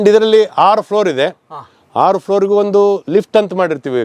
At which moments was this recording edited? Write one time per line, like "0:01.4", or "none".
none